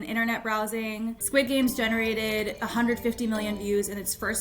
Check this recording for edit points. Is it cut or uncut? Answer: cut